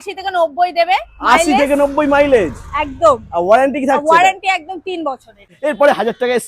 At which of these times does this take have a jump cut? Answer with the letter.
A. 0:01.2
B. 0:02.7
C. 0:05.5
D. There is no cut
C